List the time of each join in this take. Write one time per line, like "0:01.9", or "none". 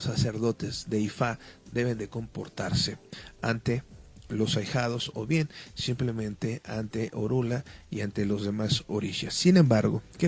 0:04.8

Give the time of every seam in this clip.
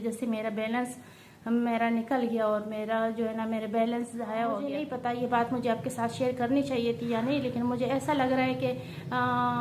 0:04.8

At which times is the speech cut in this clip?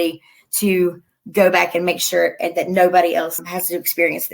0:03.4

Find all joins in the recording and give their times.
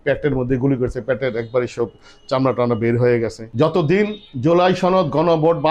0:03.4

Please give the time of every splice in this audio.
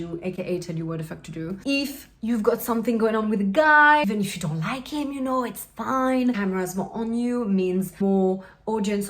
0:01.6
0:04.0
0:06.3
0:08.0

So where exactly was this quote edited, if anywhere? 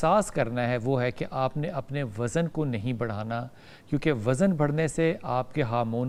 none

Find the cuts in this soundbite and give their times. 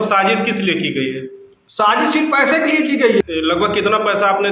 0:03.2

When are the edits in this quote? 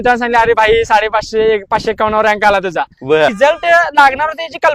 0:03.3

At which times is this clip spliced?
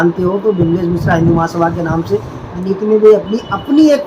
0:02.6

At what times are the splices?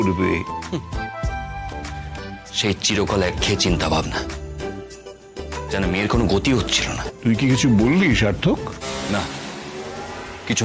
0:07.0

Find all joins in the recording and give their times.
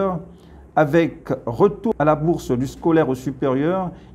0:01.9

